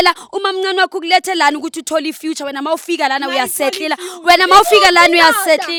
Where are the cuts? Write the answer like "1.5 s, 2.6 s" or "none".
none